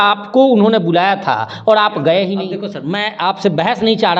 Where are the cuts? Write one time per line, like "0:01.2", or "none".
0:02.7

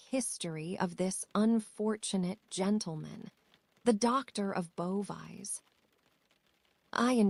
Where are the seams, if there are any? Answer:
none

